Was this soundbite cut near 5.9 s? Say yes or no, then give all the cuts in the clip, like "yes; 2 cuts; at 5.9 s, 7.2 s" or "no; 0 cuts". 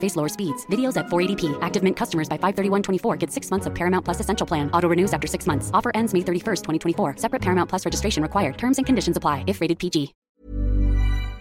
no; 1 cut; at 10.2 s